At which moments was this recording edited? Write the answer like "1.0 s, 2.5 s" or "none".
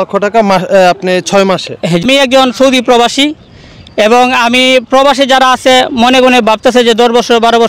2.0 s

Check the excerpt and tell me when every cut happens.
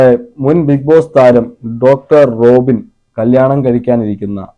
none

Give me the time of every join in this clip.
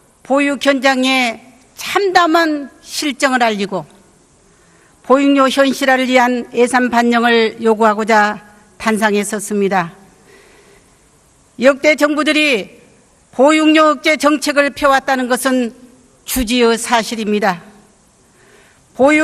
none

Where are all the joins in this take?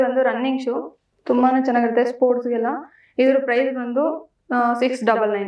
none

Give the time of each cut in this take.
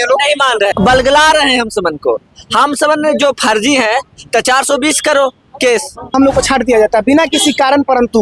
0.7 s, 6.1 s

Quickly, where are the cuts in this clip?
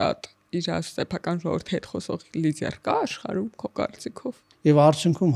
4.5 s

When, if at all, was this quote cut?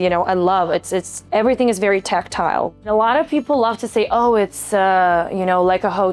1.2 s, 2.8 s

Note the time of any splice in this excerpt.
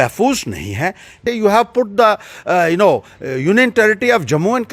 1.2 s

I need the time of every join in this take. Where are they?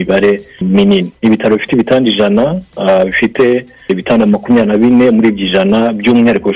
1.1 s

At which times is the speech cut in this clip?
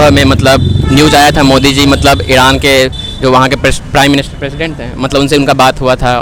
none

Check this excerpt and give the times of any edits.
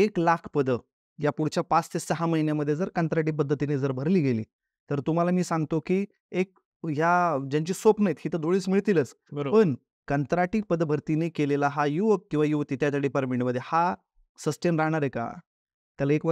none

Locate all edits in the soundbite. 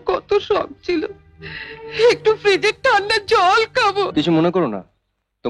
4.1 s

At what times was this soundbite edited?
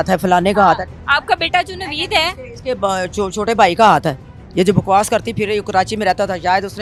none

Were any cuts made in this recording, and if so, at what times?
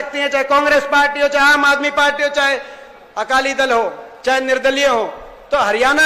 none

